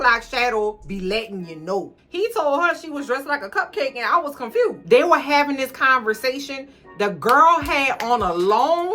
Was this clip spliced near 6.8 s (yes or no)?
no